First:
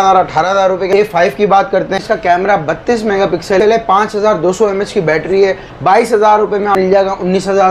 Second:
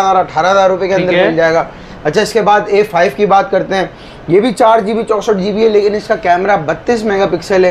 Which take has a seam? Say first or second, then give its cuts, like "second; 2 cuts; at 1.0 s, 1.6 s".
first; 5 cuts; at 0.9 s, 2.0 s, 3.6 s, 5.7 s, 6.7 s